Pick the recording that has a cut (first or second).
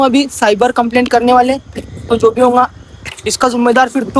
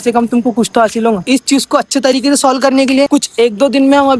second